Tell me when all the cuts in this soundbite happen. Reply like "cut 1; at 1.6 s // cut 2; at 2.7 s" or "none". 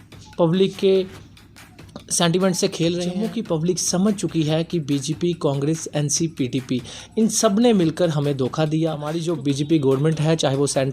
cut 1; at 3.2 s // cut 2; at 9.1 s